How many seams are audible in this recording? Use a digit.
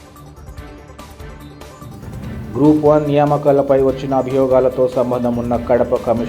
1